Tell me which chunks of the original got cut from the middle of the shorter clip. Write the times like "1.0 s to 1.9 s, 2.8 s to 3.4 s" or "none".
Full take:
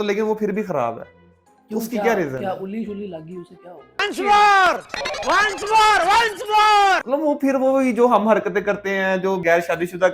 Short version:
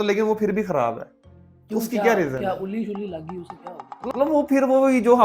4.1 s to 7.0 s